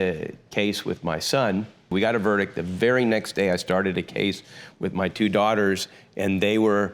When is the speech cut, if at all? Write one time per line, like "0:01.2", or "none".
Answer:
0:01.9